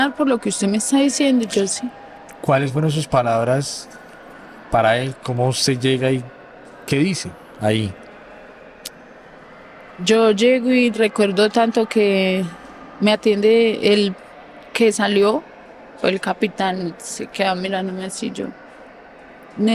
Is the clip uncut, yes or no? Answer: yes